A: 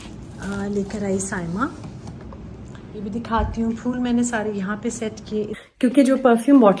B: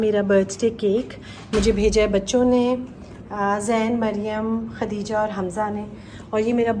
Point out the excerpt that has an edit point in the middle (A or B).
A